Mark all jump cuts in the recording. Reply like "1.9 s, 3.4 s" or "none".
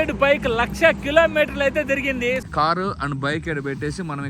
2.5 s